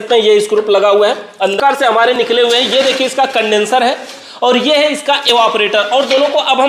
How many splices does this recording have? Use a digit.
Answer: 1